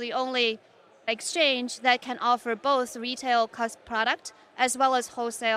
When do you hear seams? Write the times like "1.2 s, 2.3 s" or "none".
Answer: 1.1 s